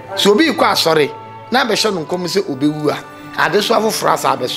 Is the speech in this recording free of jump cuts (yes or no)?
yes